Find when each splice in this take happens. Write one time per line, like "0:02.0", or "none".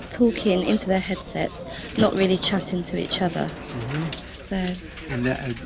0:02.7